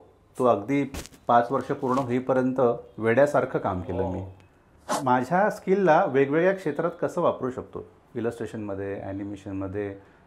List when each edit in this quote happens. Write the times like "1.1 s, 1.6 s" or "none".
4.9 s